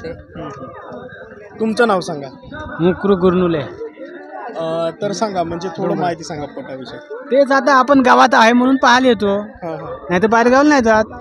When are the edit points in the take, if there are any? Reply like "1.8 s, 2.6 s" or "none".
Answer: none